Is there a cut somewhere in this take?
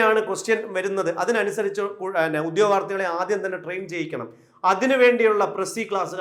no; 0 cuts

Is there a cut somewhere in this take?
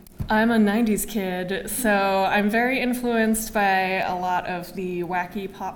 yes; 1 cut; at 2.6 s

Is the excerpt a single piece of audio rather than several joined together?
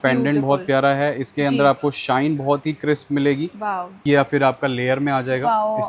no; 1 cut; at 4.0 s

